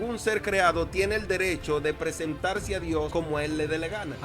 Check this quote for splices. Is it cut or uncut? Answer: cut